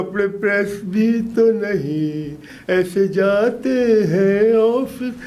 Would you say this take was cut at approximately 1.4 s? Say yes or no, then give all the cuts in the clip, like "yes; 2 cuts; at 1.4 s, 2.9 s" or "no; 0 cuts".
no; 0 cuts